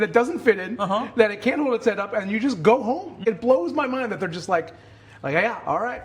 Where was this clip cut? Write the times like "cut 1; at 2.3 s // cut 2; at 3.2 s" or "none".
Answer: cut 1; at 3.2 s